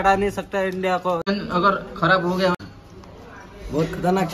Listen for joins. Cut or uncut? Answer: cut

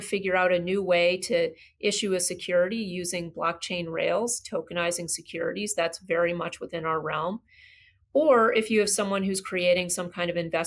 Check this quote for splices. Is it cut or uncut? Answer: uncut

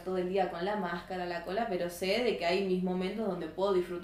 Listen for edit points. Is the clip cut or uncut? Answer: uncut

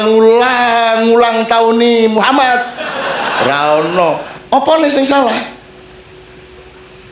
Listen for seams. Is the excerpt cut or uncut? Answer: cut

